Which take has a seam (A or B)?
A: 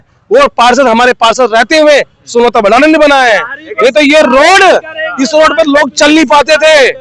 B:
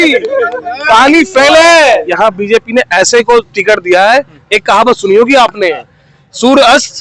B